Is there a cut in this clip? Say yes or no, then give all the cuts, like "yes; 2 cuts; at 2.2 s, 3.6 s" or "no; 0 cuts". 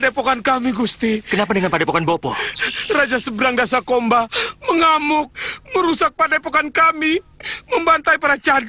no; 0 cuts